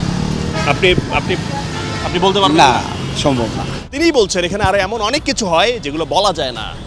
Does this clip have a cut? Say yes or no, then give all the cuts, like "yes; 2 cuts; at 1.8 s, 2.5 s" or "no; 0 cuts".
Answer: no; 0 cuts